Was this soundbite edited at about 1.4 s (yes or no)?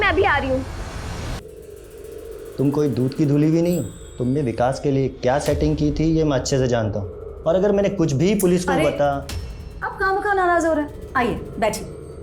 yes